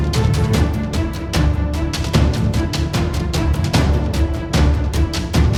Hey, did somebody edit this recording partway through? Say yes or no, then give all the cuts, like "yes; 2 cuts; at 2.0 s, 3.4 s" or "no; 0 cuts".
no; 0 cuts